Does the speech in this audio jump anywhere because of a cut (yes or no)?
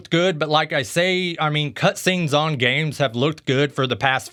no